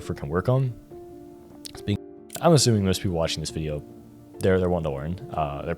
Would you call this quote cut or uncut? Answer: cut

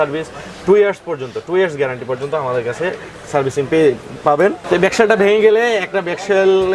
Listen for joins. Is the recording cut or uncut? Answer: cut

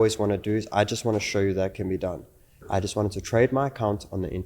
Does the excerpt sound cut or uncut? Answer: cut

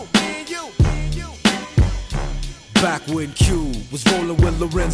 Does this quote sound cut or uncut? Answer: uncut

